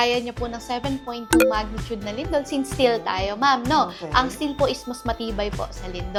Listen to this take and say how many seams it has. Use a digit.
0